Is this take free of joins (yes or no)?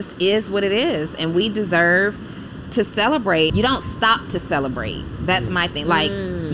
no